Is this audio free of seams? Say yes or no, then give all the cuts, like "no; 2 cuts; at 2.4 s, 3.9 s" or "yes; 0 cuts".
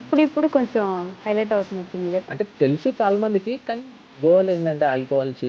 no; 1 cut; at 2.3 s